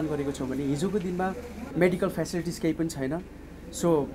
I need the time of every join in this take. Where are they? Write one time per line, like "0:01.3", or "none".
0:01.6